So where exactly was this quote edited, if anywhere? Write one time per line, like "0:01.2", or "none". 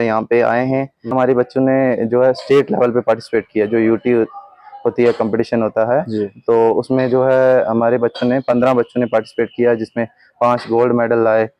0:01.1